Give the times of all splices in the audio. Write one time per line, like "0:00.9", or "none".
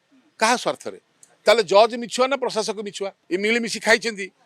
0:03.1